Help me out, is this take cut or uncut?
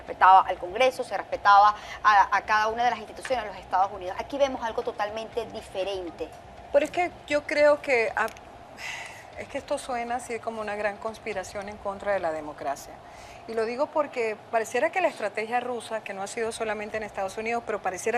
cut